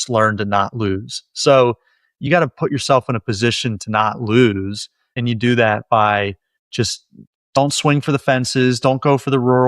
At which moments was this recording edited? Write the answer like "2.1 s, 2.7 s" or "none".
5.2 s